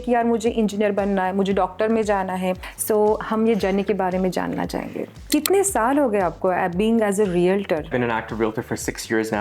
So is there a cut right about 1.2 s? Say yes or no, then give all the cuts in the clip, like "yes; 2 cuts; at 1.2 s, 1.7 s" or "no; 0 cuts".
no; 3 cuts; at 2.7 s, 5.2 s, 7.9 s